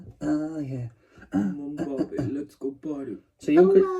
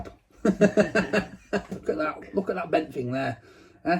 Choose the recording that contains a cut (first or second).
second